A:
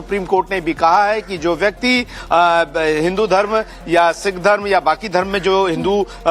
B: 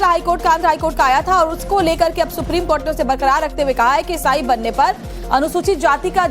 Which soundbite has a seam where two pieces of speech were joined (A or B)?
B